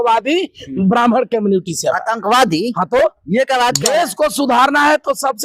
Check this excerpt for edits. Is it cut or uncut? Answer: cut